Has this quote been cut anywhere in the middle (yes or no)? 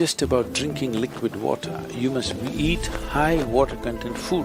no